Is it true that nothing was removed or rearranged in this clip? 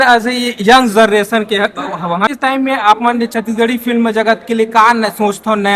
no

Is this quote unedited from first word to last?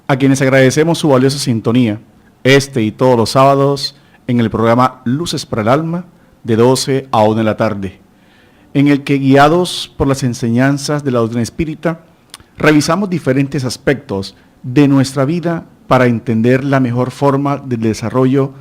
no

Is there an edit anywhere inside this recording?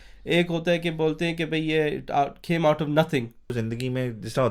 yes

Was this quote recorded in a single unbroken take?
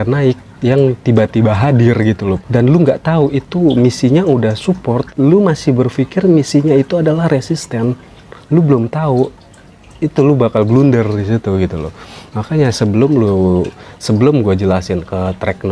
yes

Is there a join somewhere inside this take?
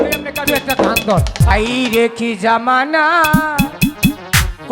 yes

